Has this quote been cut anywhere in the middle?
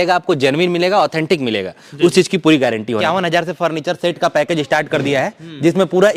yes; 1 cut; at 2.9 s

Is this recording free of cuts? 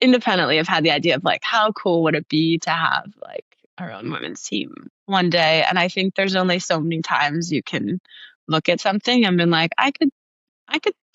yes; 0 cuts

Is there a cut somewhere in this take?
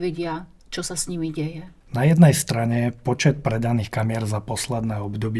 no; 0 cuts

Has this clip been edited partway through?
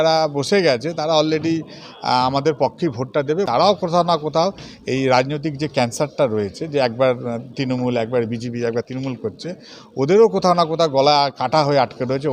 yes; 1 cut; at 3.5 s

